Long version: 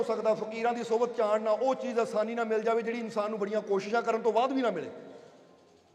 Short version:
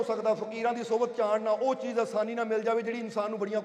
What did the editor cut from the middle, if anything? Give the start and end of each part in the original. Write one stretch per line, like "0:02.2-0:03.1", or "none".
none